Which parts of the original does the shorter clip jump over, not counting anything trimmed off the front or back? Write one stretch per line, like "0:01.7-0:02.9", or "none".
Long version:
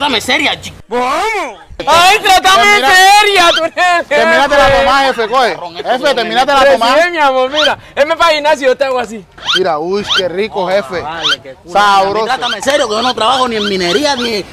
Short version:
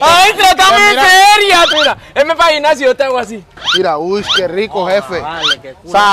0:03.6-0:07.5